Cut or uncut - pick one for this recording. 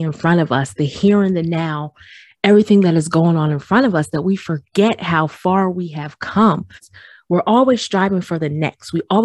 cut